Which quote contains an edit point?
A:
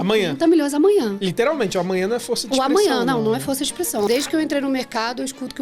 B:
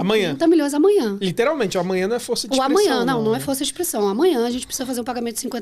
A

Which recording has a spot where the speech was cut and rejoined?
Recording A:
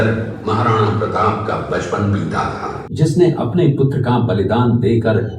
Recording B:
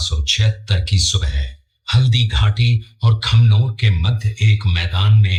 A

